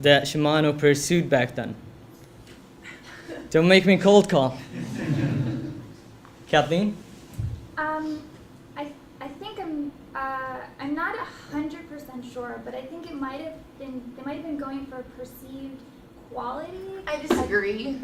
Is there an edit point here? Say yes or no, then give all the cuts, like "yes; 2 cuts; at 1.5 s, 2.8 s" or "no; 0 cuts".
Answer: no; 0 cuts